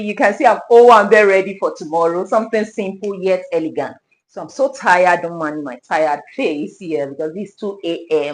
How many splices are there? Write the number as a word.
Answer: zero